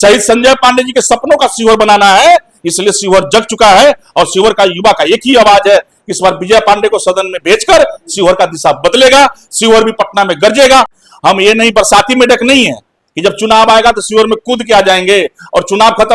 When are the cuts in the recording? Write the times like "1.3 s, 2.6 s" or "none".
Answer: 10.9 s